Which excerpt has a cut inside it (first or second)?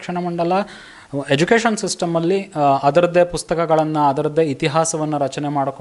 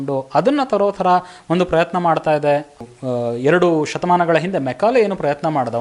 second